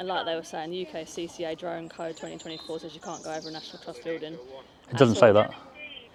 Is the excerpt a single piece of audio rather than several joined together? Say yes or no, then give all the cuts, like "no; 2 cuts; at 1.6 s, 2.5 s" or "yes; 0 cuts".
yes; 0 cuts